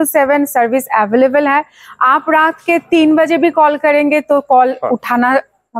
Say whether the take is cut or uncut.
uncut